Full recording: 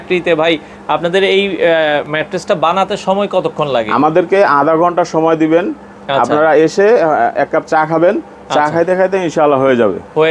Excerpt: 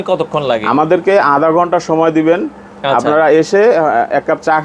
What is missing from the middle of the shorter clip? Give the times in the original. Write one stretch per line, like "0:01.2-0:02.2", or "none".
none

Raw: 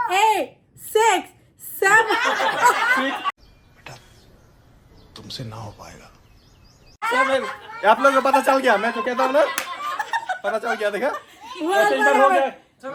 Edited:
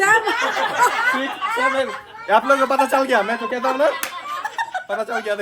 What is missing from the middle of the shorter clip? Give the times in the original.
0:03.3-0:07.0

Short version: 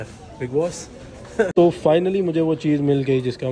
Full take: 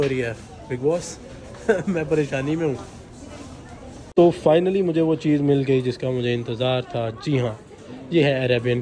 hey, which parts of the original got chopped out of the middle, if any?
0:01.8-0:04.1

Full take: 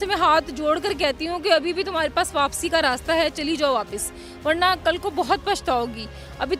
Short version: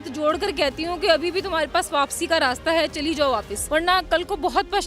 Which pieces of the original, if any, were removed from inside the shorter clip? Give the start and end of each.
0:04.0-0:04.3

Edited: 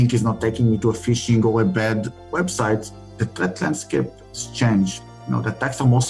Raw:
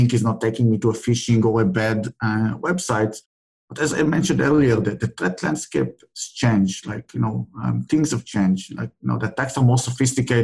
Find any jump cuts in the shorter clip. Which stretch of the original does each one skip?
0:02.2-0:02.5
0:03.5-0:05.1
0:06.9-0:08.8

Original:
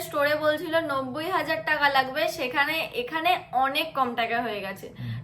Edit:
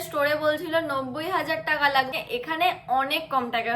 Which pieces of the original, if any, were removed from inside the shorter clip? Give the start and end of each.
0:02.1-0:02.8

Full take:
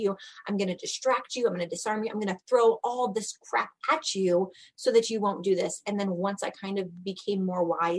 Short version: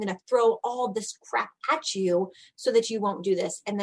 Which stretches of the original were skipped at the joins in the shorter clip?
none

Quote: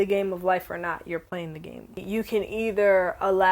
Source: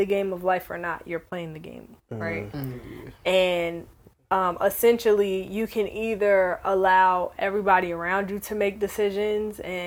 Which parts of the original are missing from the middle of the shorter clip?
0:02.0-0:05.5

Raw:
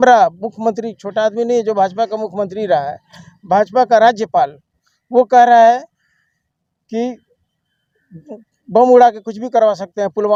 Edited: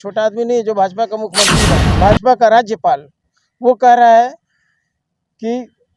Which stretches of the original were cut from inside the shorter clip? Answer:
0:02.6-0:03.1

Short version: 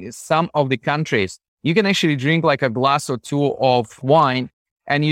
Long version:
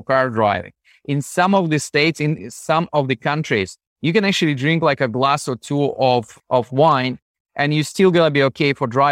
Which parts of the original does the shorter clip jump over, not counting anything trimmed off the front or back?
0:06.4-0:06.7

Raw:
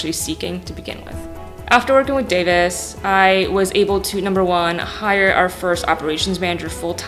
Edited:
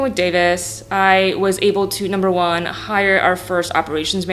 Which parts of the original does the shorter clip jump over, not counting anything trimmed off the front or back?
none

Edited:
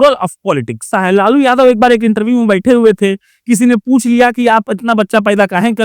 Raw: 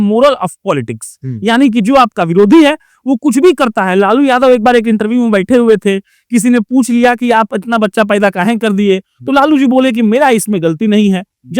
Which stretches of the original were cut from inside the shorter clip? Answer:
0:01.1-0:03.8

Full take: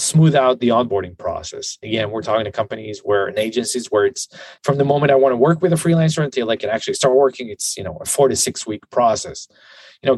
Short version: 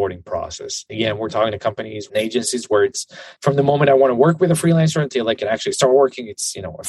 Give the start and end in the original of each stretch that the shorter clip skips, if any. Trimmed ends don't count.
0:03.0-0:03.3

